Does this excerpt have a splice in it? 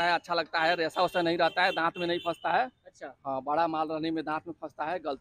no; 0 cuts

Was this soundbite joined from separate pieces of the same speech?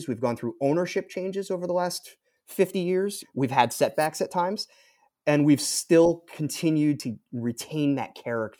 yes; 2 cuts; at 3.2 s, 7.0 s

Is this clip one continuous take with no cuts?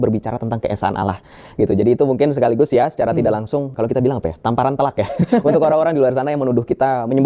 yes; 0 cuts

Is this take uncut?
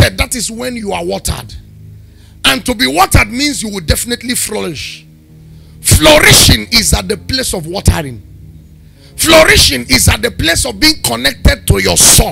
yes; 0 cuts

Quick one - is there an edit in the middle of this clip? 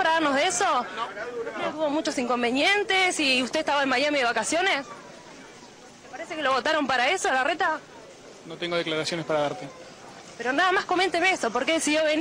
no; 0 cuts

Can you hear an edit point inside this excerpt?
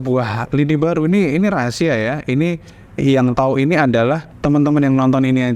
yes; 1 cut; at 4.3 s

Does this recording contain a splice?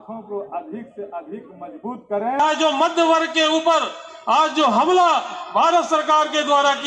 yes; 1 cut; at 2.4 s

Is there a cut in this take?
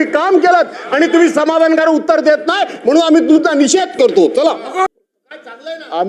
yes; 1 cut; at 4.9 s

